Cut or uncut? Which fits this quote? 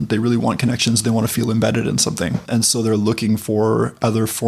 cut